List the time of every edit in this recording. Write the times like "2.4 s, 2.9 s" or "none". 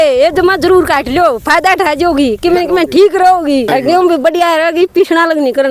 3.7 s